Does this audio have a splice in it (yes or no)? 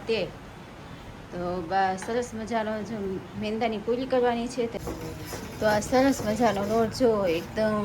yes